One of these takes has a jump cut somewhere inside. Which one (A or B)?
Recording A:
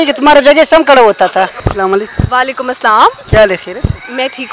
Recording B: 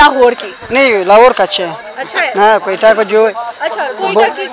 A